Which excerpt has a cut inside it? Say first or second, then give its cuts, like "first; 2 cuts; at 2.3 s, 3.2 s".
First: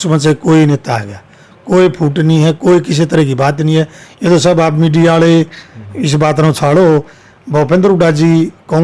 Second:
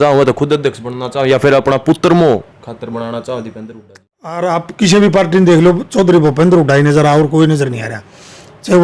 second; 1 cut; at 4.4 s